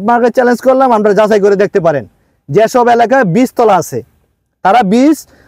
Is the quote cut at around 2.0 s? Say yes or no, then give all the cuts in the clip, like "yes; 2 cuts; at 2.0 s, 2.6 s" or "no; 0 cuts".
no; 0 cuts